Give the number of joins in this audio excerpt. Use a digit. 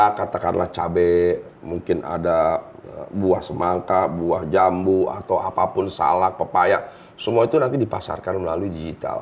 0